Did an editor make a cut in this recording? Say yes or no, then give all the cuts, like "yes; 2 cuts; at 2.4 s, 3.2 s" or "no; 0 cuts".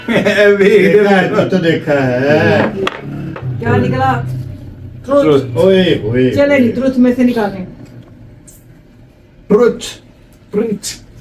no; 0 cuts